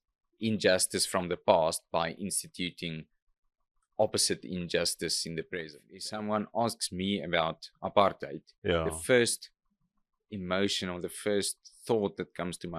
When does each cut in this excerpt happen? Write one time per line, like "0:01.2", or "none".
0:05.9